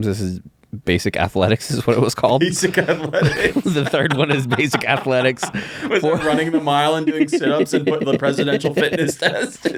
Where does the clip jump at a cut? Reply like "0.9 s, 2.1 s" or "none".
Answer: none